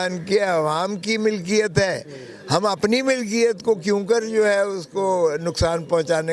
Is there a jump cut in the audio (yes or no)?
no